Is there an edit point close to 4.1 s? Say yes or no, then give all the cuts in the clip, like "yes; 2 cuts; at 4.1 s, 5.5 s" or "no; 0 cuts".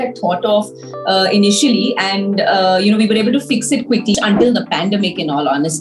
yes; 1 cut; at 4.1 s